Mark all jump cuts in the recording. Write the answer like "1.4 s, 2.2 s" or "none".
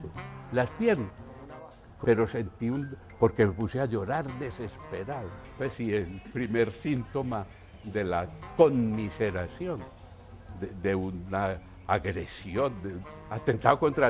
1.8 s, 5.4 s